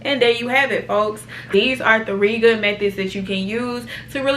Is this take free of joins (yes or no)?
no